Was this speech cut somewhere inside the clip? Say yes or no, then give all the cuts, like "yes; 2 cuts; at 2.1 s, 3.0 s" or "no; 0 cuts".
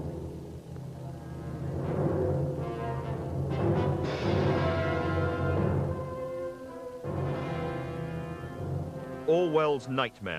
yes; 1 cut; at 1.3 s